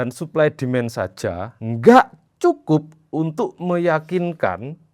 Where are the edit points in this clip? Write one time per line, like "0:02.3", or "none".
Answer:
0:01.5

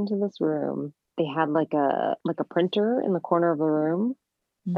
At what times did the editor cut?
0:01.1
0:02.2

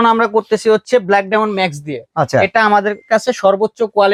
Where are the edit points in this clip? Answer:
none

